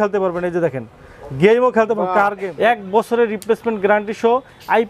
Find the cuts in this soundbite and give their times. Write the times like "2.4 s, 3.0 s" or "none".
2.5 s